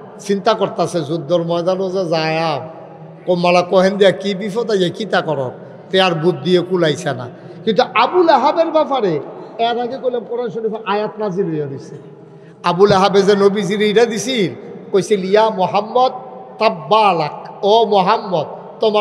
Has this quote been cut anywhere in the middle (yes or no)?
no